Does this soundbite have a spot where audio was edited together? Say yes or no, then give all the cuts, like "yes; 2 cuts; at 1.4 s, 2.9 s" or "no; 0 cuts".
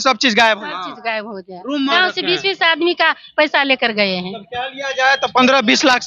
yes; 1 cut; at 1.9 s